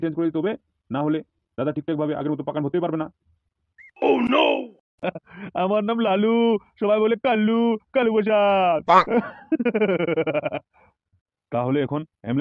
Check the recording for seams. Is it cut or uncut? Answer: cut